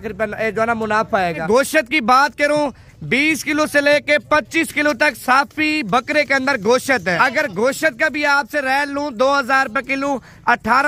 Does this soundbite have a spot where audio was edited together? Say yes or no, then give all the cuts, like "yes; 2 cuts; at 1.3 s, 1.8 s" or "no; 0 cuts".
yes; 2 cuts; at 1.4 s, 7.2 s